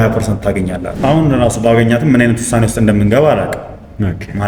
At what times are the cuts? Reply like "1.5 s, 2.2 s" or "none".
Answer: 0.9 s